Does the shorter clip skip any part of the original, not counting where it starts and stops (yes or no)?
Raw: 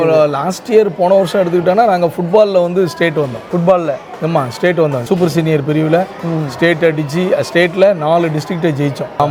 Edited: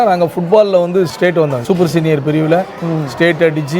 yes